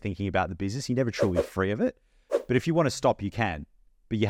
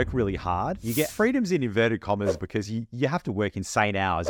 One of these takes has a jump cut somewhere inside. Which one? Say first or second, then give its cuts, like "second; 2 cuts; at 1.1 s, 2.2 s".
second; 2 cuts; at 1.1 s, 2.4 s